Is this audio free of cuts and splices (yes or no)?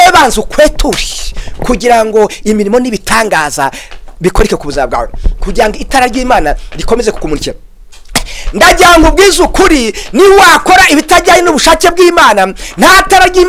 yes